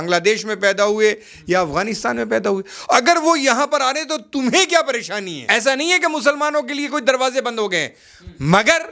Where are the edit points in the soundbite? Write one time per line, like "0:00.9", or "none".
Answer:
0:05.3